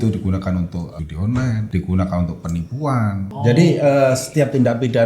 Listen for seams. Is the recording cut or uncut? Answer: cut